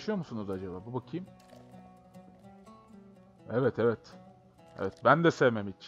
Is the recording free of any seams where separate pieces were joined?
yes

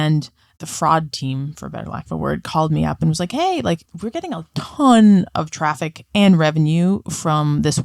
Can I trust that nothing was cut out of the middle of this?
yes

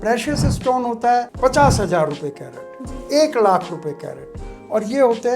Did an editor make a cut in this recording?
yes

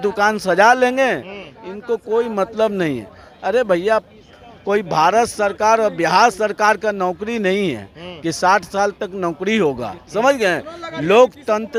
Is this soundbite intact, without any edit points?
yes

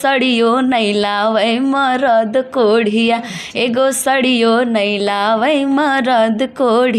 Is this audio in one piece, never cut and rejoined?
yes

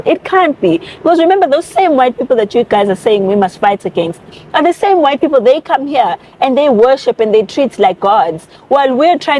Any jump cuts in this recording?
no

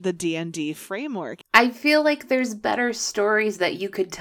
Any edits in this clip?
yes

